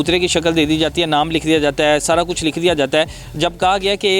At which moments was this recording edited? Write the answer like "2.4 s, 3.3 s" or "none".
none